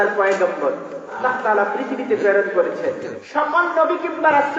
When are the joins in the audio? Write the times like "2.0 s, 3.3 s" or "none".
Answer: 1.2 s, 3.1 s